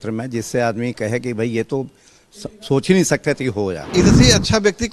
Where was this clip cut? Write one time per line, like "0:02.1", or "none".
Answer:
0:03.9